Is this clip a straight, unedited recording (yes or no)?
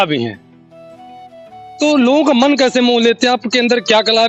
yes